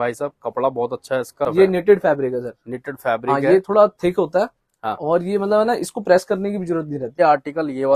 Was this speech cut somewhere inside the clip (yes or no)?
yes